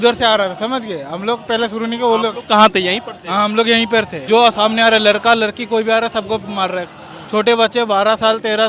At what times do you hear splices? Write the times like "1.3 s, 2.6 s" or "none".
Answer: 4.2 s